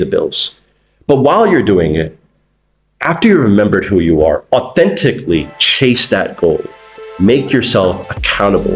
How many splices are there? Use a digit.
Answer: 0